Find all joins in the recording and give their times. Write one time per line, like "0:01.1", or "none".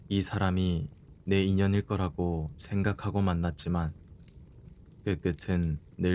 none